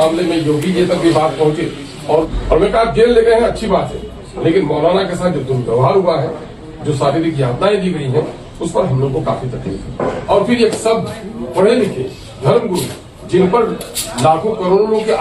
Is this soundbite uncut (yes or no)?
no